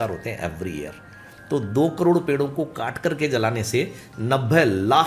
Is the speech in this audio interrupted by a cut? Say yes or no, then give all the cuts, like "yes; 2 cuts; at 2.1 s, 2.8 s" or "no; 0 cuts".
no; 0 cuts